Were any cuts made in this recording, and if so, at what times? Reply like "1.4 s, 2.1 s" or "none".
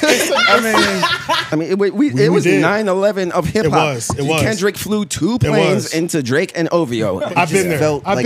1.5 s, 7.2 s